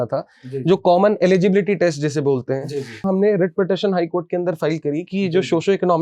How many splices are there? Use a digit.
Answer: 1